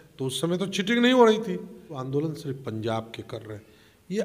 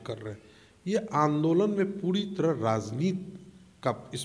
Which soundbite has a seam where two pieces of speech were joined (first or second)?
first